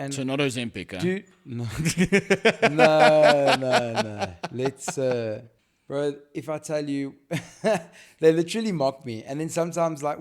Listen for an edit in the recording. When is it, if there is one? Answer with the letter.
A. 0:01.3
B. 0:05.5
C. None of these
B